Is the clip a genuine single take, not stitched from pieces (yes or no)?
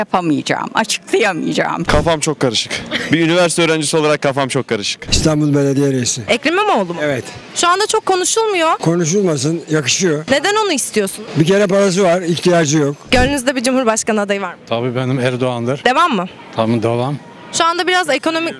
no